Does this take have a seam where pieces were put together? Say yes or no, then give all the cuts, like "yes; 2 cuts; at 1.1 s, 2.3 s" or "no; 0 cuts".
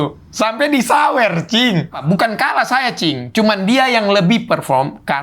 yes; 1 cut; at 2.1 s